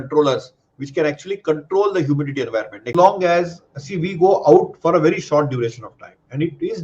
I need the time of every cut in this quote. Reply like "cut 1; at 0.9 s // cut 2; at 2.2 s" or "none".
cut 1; at 2.9 s